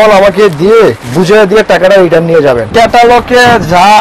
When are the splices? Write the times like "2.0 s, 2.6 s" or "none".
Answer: 1.0 s, 2.7 s

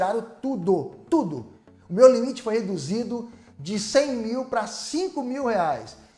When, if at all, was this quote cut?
none

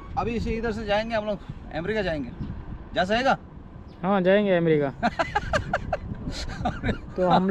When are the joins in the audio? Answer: none

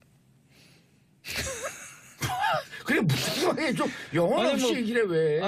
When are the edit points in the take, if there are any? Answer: none

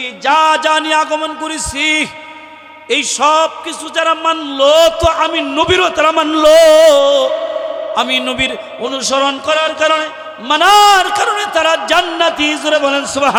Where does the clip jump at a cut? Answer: none

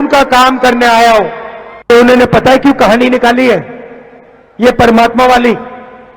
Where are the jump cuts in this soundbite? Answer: 1.9 s

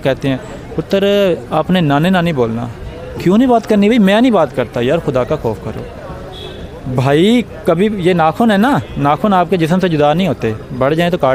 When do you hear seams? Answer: none

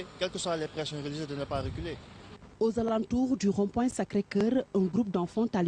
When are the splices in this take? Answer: 2.2 s

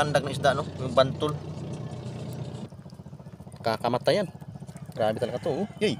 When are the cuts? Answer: 2.7 s

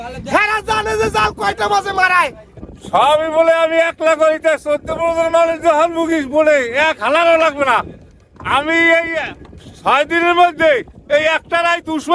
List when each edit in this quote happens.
none

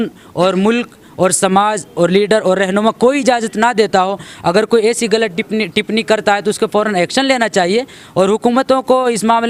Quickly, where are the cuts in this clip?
none

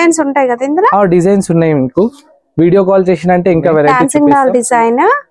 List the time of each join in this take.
3.9 s

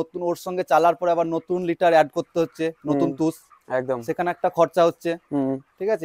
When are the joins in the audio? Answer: none

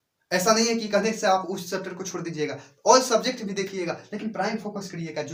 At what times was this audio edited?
none

